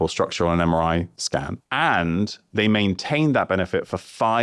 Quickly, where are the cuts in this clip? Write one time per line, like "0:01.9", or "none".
0:01.6